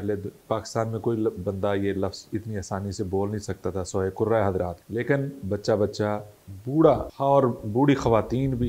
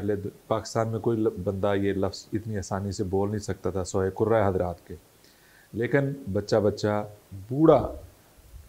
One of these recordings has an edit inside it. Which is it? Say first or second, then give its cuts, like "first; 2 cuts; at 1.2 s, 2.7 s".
first; 2 cuts; at 4.8 s, 7.1 s